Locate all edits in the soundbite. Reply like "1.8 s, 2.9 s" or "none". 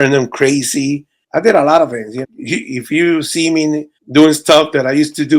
1.1 s, 2.2 s